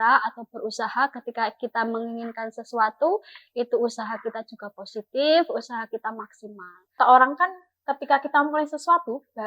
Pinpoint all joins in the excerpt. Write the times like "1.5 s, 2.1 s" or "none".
7.0 s